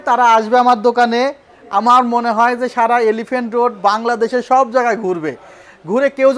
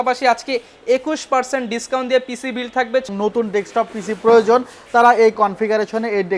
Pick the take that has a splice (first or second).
second